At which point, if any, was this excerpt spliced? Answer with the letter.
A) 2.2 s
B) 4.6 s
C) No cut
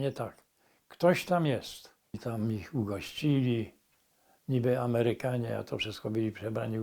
A